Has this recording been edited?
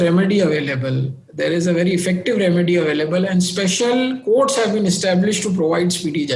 no; 0 cuts

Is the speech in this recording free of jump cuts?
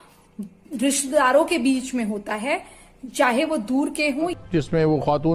no; 1 cut; at 4.3 s

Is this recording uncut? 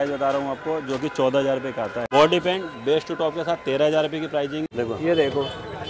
no; 2 cuts; at 2.1 s, 4.7 s

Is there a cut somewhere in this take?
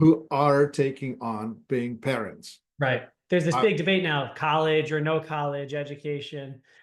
yes; 1 cut; at 3.1 s

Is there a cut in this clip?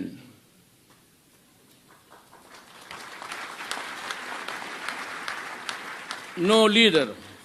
yes; 1 cut; at 5.7 s

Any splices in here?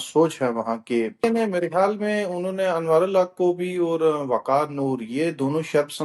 yes; 1 cut; at 1.2 s

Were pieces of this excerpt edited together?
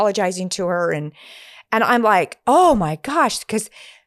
no; 0 cuts

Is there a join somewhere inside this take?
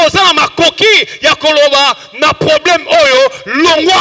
no; 0 cuts

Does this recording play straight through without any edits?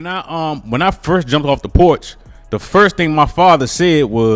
yes; 0 cuts

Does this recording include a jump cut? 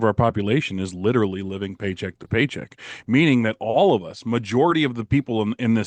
no; 0 cuts

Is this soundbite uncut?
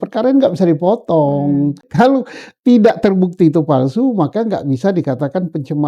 no; 1 cut; at 1.9 s

